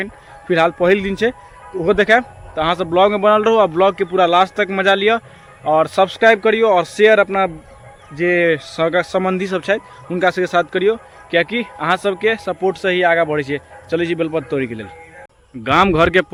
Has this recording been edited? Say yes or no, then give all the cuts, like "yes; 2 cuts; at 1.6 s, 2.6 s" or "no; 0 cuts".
no; 0 cuts